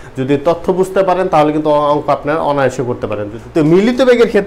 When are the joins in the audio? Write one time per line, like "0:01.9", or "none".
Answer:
0:03.4